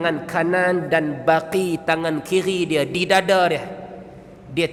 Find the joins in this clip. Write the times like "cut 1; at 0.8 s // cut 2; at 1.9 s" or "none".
none